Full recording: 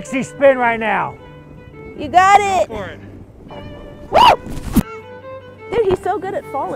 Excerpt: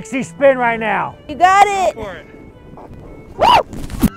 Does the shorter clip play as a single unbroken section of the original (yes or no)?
no